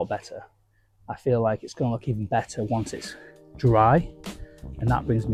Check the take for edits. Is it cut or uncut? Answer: uncut